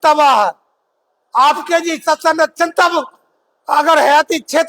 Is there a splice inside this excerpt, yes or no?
no